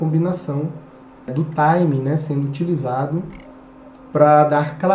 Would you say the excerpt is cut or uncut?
cut